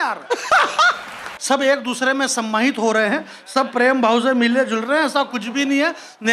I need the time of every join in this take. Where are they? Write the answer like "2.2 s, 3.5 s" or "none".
1.3 s